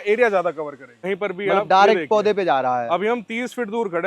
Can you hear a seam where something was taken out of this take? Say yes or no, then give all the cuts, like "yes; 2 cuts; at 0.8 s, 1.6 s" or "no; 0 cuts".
yes; 1 cut; at 0.9 s